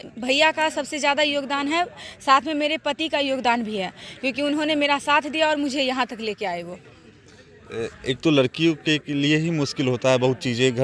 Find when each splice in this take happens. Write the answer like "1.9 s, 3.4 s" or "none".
none